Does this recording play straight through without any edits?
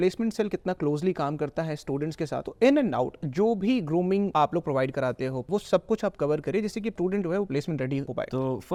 yes; 0 cuts

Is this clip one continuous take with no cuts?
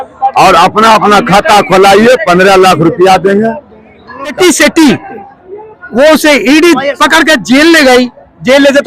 no; 1 cut; at 4.3 s

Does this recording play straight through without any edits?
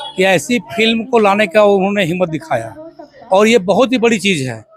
yes; 0 cuts

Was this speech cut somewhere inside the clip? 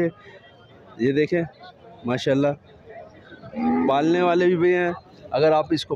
no; 0 cuts

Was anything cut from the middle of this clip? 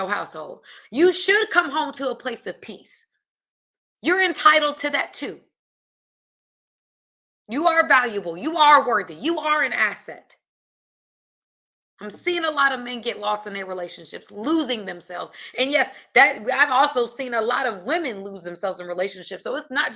no; 0 cuts

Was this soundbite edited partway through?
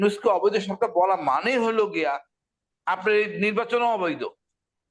no; 0 cuts

